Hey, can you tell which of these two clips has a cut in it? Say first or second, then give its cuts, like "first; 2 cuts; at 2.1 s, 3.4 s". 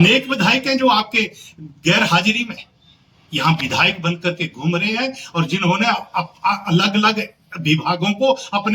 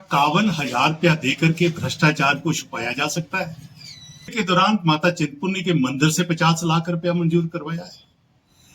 second; 1 cut; at 4.3 s